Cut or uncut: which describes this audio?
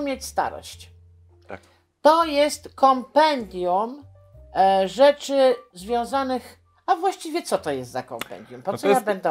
uncut